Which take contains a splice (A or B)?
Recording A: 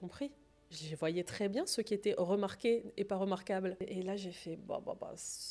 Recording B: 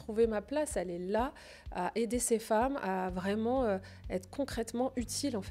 A